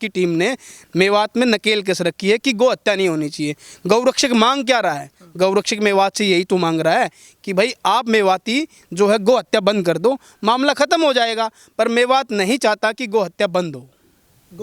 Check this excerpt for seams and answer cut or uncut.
uncut